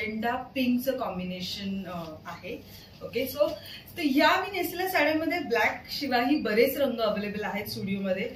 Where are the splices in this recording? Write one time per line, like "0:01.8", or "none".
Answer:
none

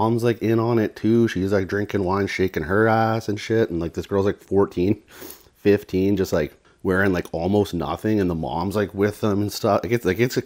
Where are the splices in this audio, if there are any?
0:06.7

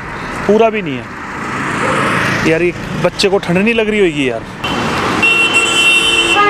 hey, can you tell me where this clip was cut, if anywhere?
0:04.6

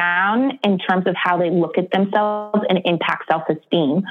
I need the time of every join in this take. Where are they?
none

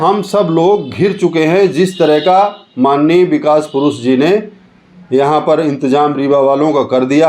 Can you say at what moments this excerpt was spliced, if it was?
none

